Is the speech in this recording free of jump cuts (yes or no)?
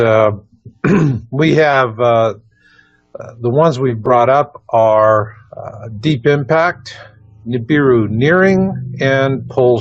no